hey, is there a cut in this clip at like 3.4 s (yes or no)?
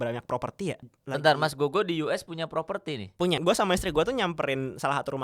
yes